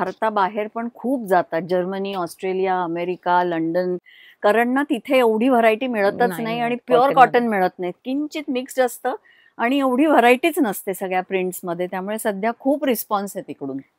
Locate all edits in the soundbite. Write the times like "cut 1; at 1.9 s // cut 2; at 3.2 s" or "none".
none